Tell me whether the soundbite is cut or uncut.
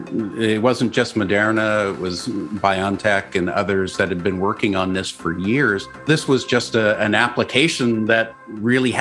cut